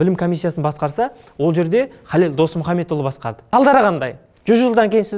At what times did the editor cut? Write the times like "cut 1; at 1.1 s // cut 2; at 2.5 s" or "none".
cut 1; at 3.4 s